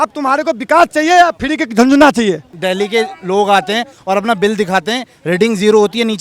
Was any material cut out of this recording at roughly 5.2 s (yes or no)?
no